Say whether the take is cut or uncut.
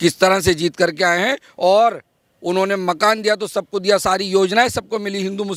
uncut